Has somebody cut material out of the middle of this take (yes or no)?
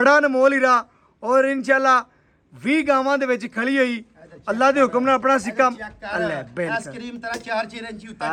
no